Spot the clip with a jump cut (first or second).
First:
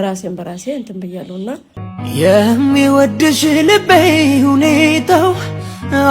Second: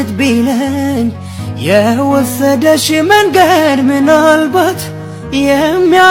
first